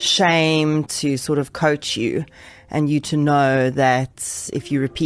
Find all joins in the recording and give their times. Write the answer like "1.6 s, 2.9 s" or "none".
0.9 s